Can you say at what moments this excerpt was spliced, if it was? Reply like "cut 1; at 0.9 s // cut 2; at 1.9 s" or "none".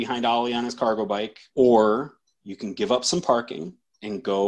cut 1; at 1.4 s